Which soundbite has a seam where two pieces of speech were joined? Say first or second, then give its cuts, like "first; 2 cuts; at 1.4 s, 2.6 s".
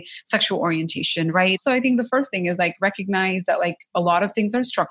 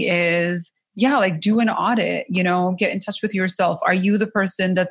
first; 1 cut; at 1.6 s